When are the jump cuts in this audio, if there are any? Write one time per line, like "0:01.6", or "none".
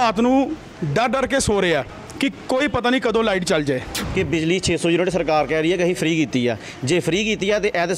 0:04.0